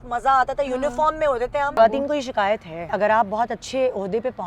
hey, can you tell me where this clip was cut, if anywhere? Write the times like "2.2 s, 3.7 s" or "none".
1.8 s, 2.8 s